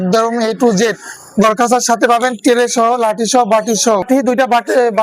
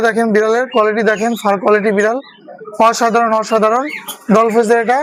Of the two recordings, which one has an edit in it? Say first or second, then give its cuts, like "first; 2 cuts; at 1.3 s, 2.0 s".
first; 1 cut; at 4.0 s